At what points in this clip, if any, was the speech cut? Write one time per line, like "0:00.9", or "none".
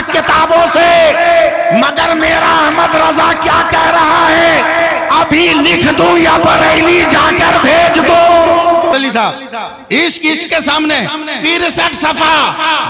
0:08.9

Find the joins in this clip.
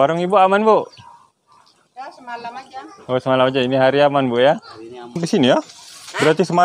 0:05.2

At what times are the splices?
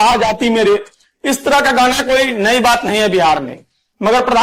none

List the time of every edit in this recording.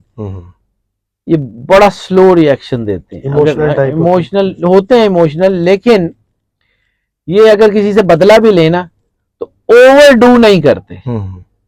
none

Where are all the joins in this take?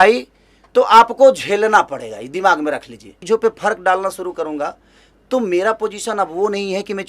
0:03.1

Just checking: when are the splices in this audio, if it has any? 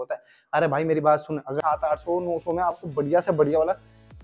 0:01.6

